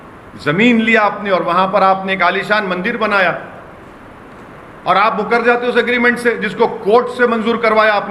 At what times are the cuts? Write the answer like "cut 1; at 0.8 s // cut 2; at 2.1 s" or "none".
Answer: none